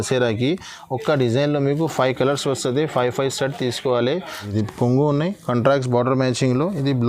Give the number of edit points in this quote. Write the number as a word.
one